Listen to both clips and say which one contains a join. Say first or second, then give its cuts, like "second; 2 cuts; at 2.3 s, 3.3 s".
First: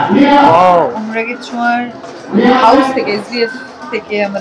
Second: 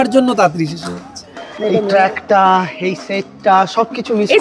second; 1 cut; at 1.4 s